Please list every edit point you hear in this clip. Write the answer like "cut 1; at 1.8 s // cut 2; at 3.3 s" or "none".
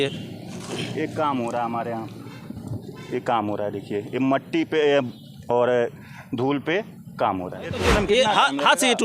cut 1; at 7.8 s